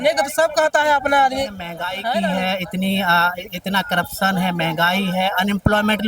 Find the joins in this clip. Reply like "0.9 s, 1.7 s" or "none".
2.1 s